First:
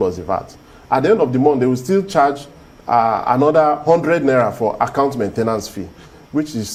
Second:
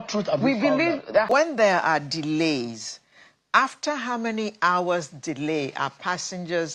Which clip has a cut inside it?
second; 1 cut; at 1.3 s

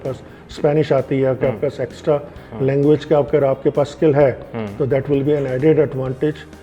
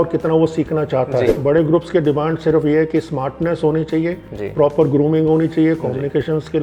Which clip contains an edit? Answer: second; 1 cut; at 1.4 s

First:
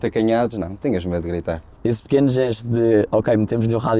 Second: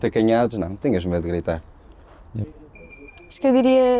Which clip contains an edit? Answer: first; 1 cut; at 1.7 s

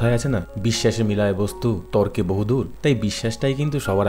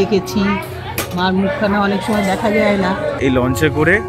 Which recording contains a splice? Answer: second; 1 cut; at 3.2 s

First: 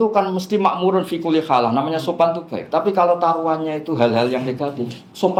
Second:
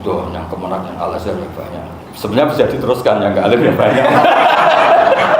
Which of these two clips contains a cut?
second; 1 cut; at 2.0 s

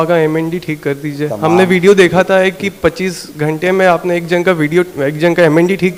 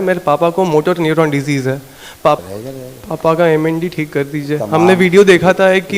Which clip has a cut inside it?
second; 1 cut; at 2.4 s

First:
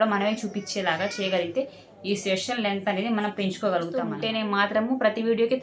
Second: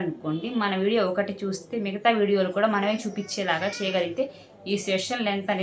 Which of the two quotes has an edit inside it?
first; 1 cut; at 4.2 s

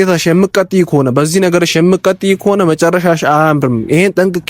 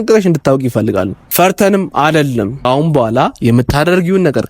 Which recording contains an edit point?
second; 2 cuts; at 1.2 s, 2.6 s

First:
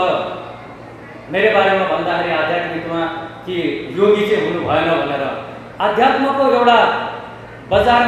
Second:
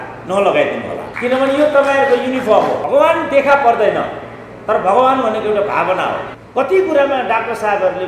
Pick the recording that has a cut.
second; 3 cuts; at 1.1 s, 2.8 s, 6.3 s

